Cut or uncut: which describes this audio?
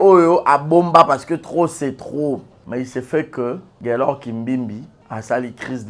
cut